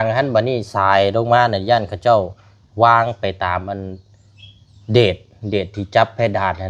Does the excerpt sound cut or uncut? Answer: uncut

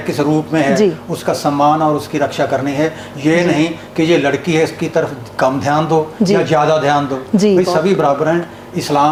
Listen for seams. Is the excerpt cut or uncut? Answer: uncut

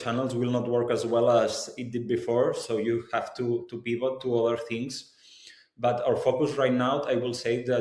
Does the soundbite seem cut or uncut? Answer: uncut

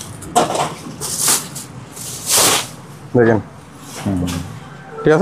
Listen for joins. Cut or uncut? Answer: uncut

